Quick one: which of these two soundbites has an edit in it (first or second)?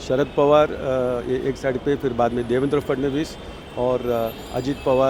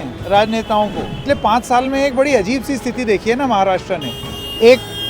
second